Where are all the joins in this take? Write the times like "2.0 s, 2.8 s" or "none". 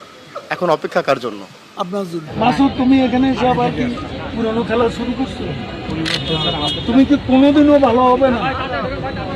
2.3 s